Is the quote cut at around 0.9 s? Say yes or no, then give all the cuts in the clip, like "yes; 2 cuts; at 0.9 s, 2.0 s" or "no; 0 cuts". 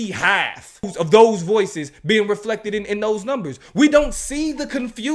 yes; 1 cut; at 0.9 s